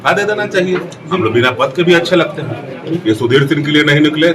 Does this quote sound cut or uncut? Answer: cut